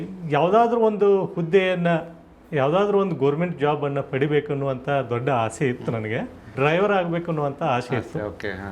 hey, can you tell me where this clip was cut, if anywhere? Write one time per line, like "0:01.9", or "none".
0:06.5